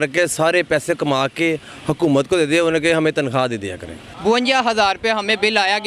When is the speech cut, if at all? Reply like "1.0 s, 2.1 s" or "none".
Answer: 4.1 s